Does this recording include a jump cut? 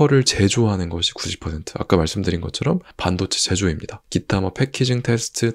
no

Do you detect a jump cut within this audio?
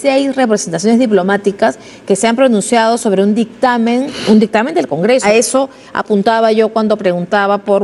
yes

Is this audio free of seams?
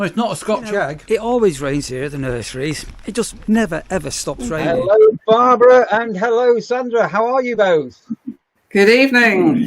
no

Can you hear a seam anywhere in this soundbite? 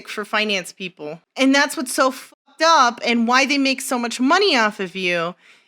yes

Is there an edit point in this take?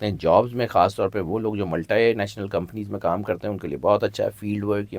no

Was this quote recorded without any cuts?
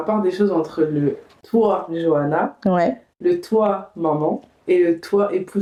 yes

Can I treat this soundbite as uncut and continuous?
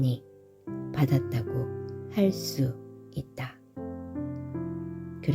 yes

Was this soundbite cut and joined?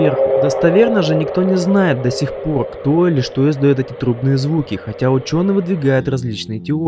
yes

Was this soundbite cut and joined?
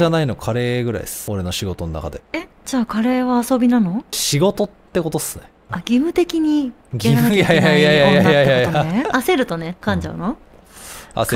yes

